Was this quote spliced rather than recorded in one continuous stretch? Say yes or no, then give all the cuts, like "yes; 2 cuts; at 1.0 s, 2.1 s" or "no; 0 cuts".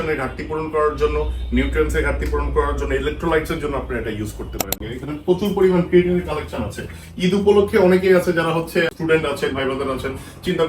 yes; 2 cuts; at 4.8 s, 8.9 s